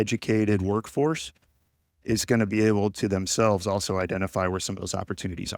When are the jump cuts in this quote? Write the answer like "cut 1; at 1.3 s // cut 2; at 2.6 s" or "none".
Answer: none